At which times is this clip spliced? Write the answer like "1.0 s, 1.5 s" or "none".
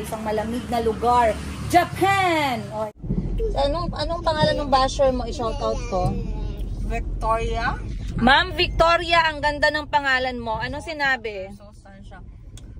3.0 s